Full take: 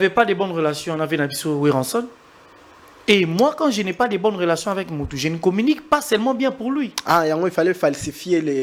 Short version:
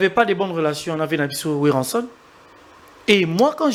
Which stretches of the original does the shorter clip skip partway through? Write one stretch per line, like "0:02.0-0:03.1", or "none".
none

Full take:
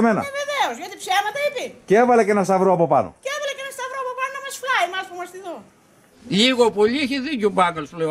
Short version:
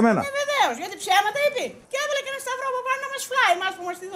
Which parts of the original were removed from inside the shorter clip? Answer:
0:01.8-0:03.1

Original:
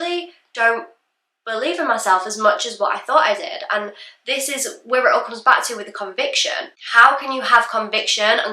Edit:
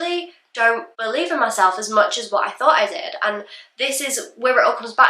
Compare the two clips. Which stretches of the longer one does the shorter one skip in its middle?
0:00.9-0:01.4

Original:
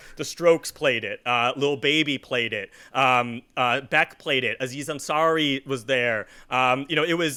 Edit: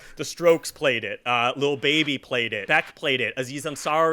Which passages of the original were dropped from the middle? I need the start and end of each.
0:02.6-0:03.9

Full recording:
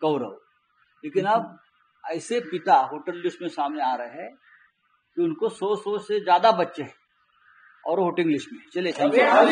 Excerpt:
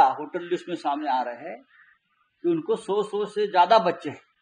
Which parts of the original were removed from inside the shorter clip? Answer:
none

